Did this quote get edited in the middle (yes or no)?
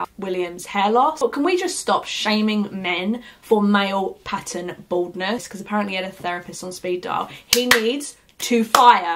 yes